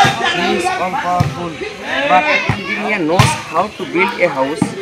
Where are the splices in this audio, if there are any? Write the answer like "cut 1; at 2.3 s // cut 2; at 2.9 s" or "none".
cut 1; at 2.6 s